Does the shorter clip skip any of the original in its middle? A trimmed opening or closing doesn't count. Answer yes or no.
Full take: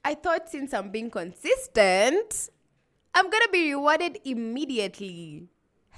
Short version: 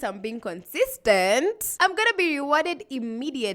yes